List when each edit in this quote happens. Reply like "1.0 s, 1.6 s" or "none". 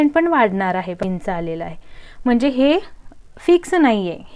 1.0 s